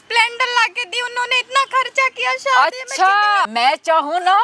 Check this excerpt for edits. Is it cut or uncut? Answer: cut